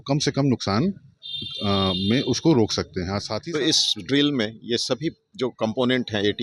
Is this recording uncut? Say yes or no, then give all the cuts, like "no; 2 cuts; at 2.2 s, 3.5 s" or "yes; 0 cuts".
no; 1 cut; at 3.3 s